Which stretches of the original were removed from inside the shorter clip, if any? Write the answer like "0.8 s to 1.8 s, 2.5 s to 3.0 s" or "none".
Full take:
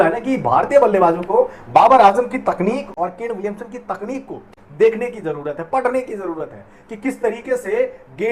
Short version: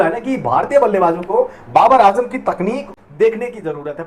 2.9 s to 4.5 s